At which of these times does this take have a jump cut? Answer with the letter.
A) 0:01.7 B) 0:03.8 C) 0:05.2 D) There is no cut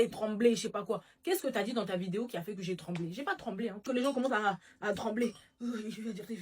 B